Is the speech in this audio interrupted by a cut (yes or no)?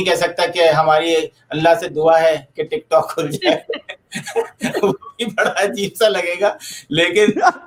no